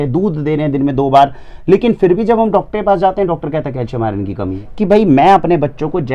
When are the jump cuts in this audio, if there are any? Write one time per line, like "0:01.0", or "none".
0:04.6